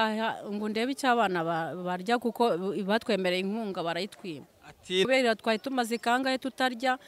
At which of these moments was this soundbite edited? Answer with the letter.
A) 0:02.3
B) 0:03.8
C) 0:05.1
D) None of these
C